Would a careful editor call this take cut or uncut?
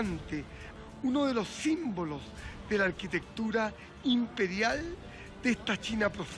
uncut